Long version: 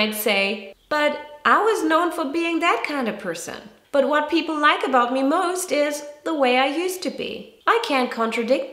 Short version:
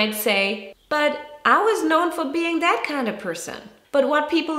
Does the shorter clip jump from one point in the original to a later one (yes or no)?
no